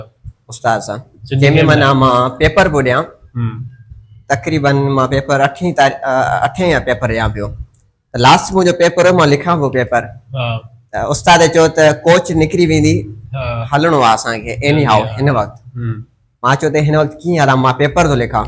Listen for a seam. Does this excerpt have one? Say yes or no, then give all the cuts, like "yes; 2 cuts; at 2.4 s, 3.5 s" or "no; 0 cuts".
no; 0 cuts